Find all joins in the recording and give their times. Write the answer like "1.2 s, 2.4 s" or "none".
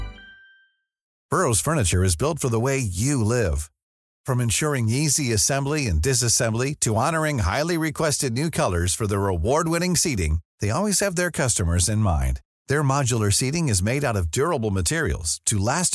1.1 s